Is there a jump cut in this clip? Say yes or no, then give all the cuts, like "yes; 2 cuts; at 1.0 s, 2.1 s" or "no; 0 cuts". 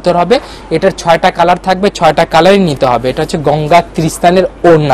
no; 0 cuts